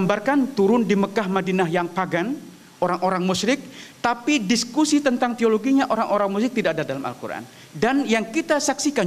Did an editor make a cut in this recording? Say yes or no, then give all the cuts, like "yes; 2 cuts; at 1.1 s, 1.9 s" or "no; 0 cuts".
no; 0 cuts